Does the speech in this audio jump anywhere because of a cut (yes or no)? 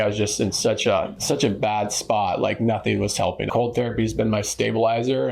yes